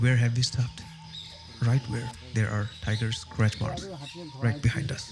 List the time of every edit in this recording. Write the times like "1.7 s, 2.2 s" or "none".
none